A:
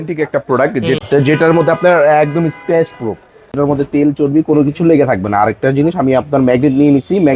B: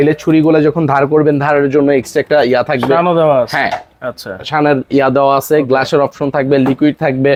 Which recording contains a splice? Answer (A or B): A